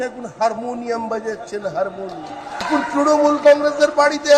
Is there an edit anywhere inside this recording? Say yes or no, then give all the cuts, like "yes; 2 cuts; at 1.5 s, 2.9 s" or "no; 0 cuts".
yes; 1 cut; at 2.7 s